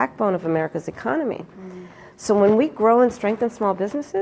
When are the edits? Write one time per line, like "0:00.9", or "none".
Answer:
none